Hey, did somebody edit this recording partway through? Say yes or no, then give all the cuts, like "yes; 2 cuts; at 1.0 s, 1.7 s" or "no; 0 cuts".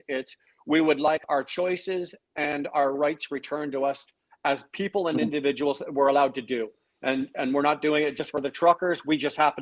no; 0 cuts